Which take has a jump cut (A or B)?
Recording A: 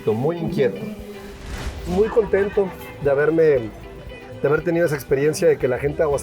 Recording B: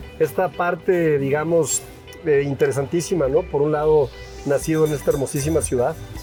A